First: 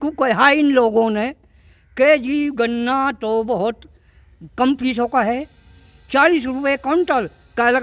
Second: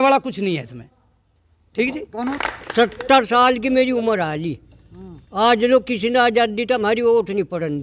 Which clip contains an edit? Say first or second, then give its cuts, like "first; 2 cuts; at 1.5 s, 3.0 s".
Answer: second; 1 cut; at 2.1 s